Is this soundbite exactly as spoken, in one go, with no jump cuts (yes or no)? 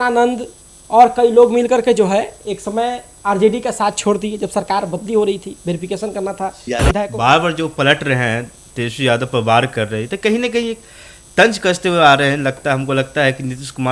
no